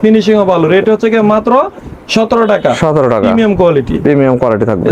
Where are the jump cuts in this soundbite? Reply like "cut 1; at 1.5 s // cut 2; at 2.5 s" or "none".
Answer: none

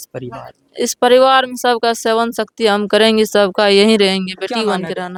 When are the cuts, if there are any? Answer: none

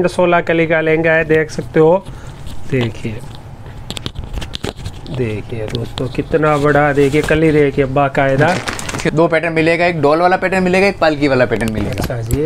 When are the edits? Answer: cut 1; at 9.1 s

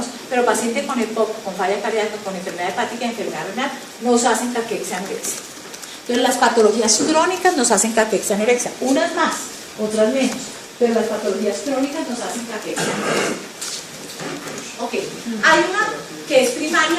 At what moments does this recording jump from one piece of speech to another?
cut 1; at 2.6 s

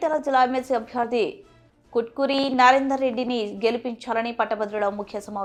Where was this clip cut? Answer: none

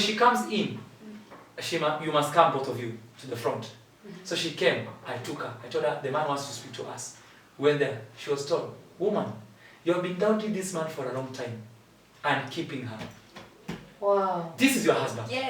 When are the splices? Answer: none

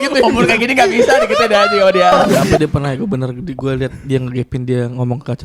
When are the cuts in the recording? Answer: cut 1; at 2.4 s

